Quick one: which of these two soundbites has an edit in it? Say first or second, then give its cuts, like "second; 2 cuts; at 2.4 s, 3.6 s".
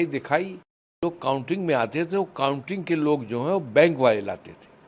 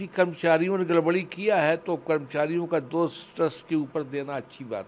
first; 1 cut; at 1.0 s